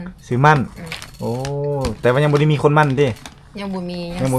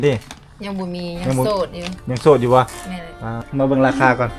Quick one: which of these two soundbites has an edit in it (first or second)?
second